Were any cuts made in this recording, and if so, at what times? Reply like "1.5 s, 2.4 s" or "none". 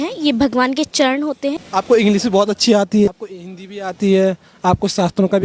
1.6 s, 3.1 s